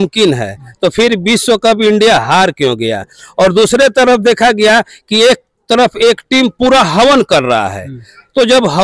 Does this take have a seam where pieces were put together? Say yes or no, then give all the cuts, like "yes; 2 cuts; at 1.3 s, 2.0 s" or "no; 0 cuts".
no; 0 cuts